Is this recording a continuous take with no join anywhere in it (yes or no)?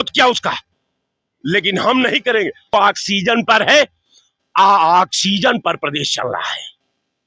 no